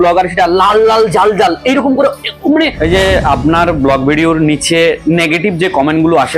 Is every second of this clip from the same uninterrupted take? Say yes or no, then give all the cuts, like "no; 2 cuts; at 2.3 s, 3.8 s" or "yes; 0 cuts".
no; 1 cut; at 2.7 s